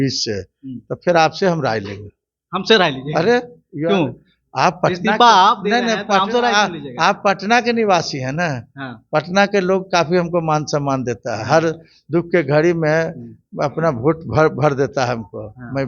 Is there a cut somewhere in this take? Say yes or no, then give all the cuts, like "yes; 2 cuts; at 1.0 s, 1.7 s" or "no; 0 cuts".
no; 0 cuts